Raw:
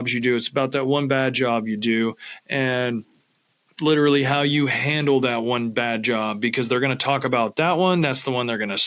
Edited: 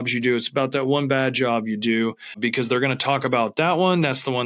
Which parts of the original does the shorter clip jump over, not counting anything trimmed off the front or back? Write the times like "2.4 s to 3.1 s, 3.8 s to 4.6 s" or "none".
2.3 s to 6.3 s

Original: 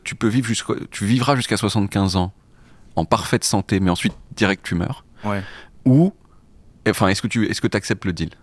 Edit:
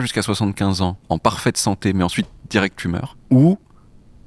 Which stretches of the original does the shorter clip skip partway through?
2.3 s to 2.9 s, 5.0 s to 5.7 s

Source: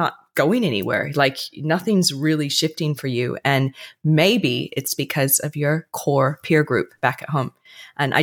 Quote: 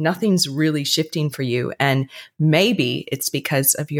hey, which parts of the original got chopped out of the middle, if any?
none

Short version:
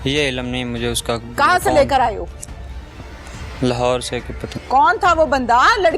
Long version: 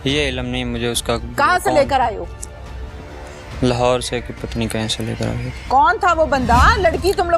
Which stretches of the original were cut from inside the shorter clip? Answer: 4.5 s to 5.5 s

